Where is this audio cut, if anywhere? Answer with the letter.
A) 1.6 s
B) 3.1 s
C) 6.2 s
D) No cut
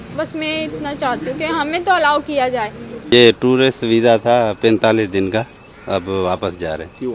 B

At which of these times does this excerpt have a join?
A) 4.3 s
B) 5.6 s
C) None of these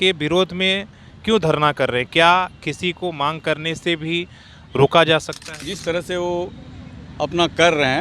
B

